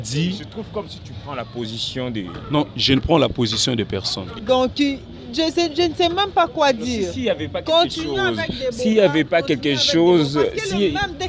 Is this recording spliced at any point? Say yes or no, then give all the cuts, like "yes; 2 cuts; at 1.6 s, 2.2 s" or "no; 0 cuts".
yes; 1 cut; at 4.2 s